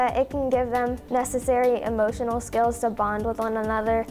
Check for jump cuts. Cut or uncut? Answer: cut